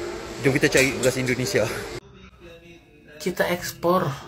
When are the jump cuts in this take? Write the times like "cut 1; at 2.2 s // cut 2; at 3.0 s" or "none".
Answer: cut 1; at 1.9 s

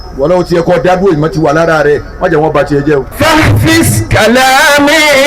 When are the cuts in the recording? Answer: cut 1; at 3.1 s

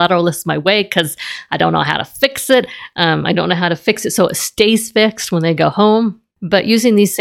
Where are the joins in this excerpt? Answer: cut 1; at 6.3 s

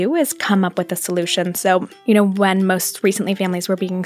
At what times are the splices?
cut 1; at 1.9 s

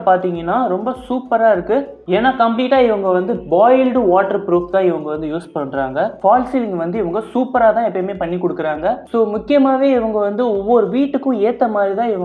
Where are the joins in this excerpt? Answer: cut 1; at 2.0 s // cut 2; at 6.2 s // cut 3; at 9.0 s

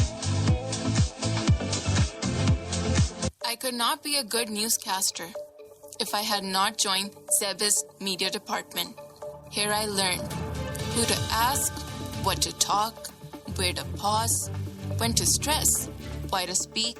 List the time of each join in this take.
cut 1; at 1.8 s

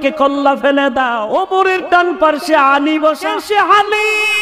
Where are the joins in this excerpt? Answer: cut 1; at 1.2 s // cut 2; at 3.4 s

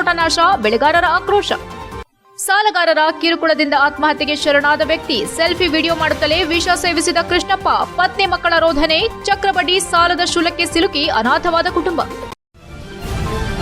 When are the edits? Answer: cut 1; at 12.4 s

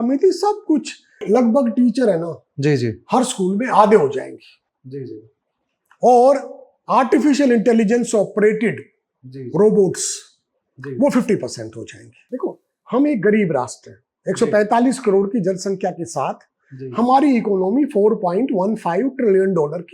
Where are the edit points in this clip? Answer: cut 1; at 1.2 s // cut 2; at 12.2 s

